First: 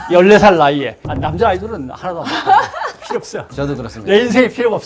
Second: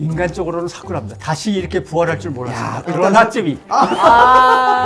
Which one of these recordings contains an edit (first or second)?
first